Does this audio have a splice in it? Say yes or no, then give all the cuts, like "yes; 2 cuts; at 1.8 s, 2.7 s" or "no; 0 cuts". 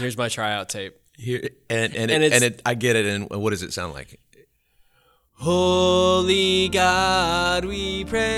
yes; 1 cut; at 5.3 s